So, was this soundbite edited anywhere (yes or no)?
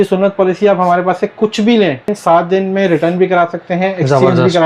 yes